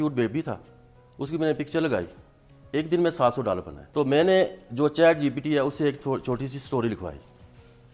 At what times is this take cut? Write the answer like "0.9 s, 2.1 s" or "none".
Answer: 3.8 s